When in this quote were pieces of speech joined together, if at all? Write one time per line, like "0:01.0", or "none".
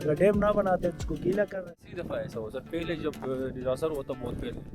0:01.6